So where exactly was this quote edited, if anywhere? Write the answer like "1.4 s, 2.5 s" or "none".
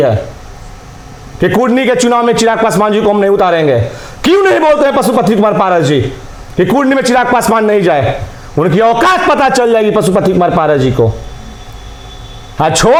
none